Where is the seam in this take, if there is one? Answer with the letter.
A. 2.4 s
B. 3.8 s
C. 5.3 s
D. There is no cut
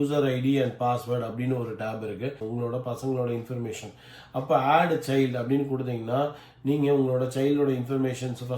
A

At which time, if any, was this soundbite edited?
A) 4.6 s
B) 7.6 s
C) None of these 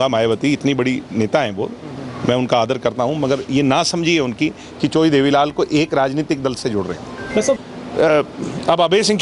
B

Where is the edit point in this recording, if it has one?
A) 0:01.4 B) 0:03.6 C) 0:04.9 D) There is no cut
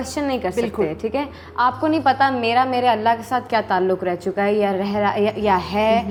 D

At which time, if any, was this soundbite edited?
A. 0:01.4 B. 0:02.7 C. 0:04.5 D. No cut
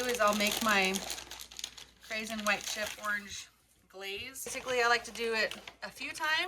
C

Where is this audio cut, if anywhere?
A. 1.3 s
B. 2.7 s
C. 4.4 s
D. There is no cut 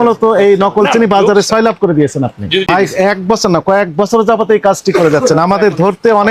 B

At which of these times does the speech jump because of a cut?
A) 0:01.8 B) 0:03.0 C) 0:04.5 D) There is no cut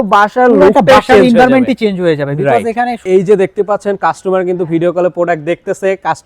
B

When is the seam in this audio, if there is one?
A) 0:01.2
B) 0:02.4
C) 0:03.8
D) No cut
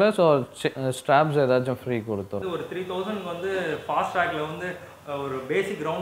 B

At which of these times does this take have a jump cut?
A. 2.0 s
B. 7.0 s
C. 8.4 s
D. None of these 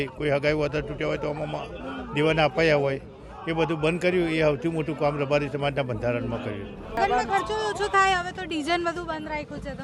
B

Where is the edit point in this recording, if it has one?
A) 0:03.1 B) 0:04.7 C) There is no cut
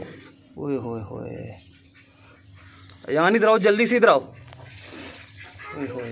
C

